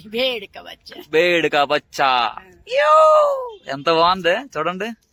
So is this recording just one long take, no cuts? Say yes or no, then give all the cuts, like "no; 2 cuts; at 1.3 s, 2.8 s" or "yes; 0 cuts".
yes; 0 cuts